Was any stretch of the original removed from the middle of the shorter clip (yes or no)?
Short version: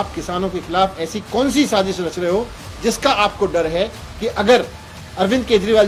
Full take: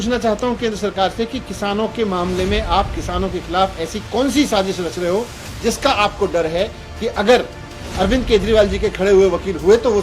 no